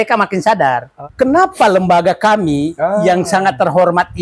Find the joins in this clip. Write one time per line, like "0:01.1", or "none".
0:00.9